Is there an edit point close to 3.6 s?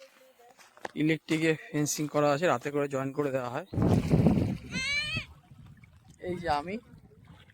yes; 1 cut; at 3.6 s

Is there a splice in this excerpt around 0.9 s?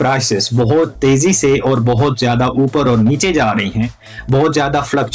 no; 0 cuts

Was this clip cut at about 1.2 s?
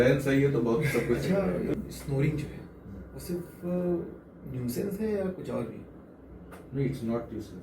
yes; 1 cut; at 1.2 s

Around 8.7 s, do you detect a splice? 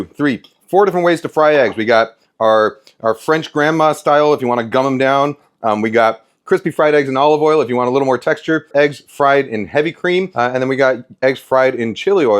yes; 2 cuts; at 8.7 s, 10.3 s

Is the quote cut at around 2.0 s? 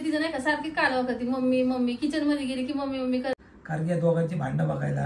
no; 1 cut; at 3.4 s

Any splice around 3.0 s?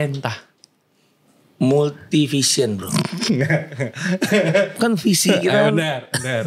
no; 0 cuts

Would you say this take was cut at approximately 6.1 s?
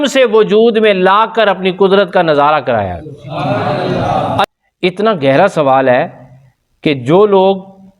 no; 1 cut; at 4.4 s

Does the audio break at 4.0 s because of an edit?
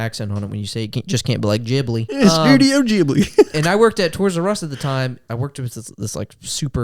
no; 2 cuts; at 2.2 s, 5.2 s

